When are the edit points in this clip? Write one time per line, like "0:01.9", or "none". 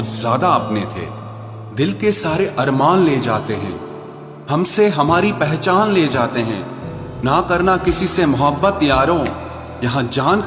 none